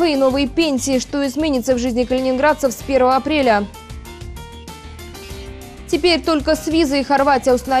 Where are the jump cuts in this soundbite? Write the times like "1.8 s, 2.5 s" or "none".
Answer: 4.1 s, 5.9 s